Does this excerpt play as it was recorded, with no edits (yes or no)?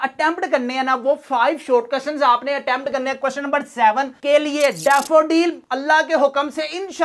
no